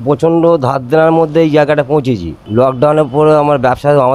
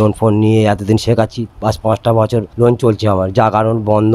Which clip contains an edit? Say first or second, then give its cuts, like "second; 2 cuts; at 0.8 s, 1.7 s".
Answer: second; 1 cut; at 2.5 s